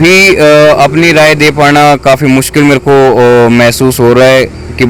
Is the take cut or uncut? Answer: uncut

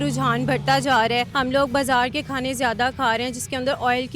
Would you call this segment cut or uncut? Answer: cut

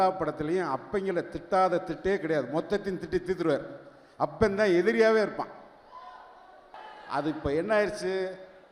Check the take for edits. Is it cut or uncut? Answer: uncut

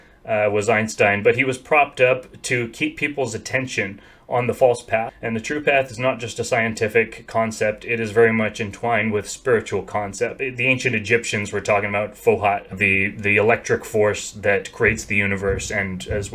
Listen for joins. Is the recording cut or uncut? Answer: cut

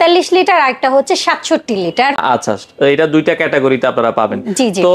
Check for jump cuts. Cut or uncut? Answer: uncut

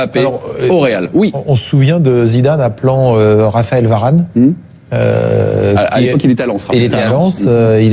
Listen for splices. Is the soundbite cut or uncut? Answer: uncut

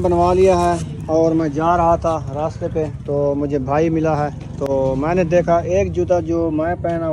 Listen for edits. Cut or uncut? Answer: uncut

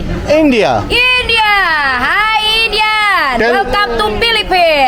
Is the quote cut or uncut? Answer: uncut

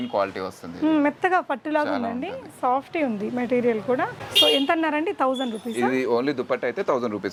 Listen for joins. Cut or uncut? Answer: uncut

